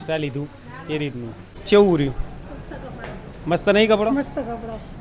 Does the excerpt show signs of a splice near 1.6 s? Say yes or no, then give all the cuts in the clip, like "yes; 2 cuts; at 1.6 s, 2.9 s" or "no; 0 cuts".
yes; 1 cut; at 1.6 s